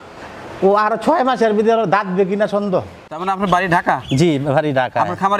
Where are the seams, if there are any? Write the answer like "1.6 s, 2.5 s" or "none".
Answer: 3.2 s